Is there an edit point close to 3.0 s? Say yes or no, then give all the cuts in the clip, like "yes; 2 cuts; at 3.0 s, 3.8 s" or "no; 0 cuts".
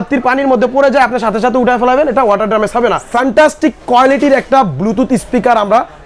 yes; 1 cut; at 3.0 s